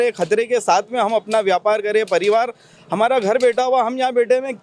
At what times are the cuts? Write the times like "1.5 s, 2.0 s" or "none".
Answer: none